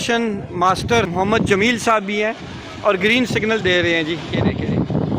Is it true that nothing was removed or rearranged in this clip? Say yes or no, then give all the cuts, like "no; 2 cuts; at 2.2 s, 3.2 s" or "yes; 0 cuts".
no; 1 cut; at 1.1 s